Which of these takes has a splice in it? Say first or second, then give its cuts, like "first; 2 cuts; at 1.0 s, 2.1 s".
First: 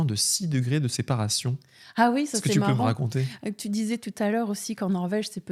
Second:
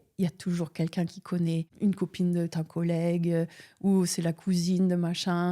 second; 1 cut; at 1.7 s